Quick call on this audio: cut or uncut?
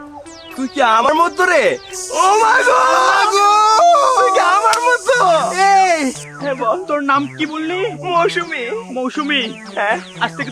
cut